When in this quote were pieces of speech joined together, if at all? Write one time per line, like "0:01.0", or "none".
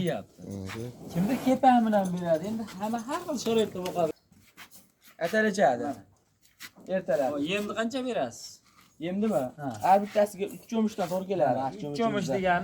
0:04.1